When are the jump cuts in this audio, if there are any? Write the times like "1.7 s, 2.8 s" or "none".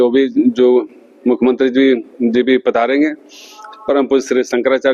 none